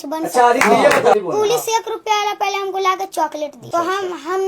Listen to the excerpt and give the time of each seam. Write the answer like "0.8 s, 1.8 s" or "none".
1.1 s, 3.7 s

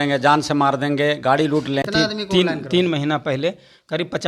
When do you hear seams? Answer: 1.9 s

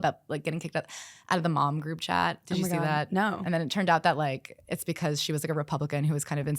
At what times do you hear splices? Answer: 3.4 s

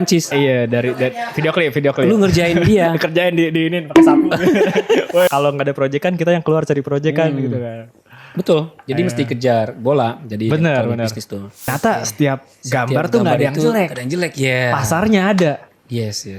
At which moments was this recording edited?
5.3 s, 11.7 s

